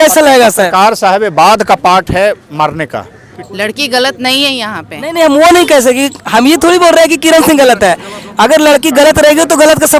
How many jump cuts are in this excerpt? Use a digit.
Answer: 1